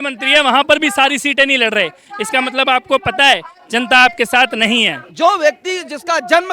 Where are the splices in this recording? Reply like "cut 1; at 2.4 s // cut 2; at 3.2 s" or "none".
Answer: cut 1; at 5.1 s